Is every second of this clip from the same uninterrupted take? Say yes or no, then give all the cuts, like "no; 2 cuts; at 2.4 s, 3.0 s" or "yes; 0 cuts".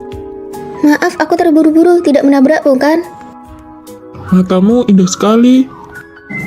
yes; 0 cuts